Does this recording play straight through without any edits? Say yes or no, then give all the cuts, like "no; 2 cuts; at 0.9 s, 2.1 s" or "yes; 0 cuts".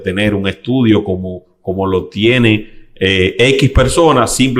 yes; 0 cuts